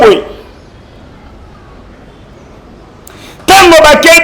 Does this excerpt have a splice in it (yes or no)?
yes